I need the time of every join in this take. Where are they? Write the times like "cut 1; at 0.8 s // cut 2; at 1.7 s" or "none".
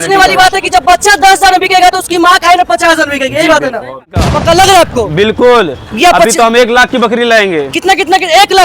cut 1; at 4.2 s